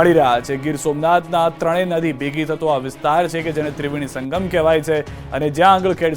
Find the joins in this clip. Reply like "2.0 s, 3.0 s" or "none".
2.6 s